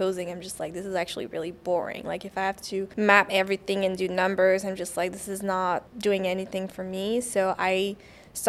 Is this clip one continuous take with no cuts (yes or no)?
no